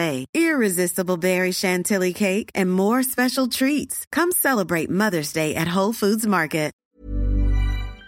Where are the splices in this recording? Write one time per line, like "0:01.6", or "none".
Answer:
0:06.8